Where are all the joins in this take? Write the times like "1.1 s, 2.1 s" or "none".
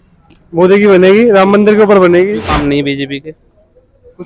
2.6 s